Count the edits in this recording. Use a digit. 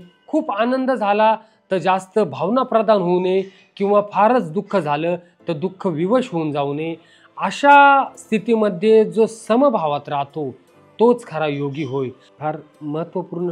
1